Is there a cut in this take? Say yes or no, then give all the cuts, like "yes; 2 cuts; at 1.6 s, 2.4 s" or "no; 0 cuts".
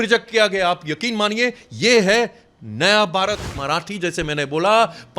yes; 1 cut; at 3.6 s